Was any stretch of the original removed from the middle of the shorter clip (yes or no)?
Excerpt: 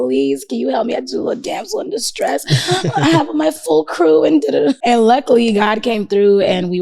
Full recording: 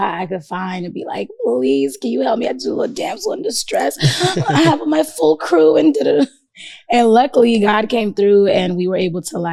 yes